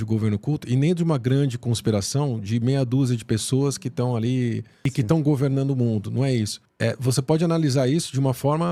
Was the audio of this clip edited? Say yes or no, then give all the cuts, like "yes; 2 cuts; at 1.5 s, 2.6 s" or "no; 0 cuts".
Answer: no; 0 cuts